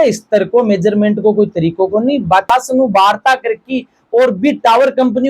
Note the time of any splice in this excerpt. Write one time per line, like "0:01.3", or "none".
0:02.5